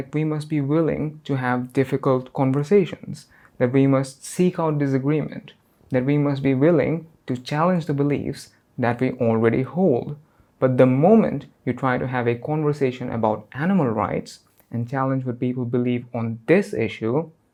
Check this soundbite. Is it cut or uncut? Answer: uncut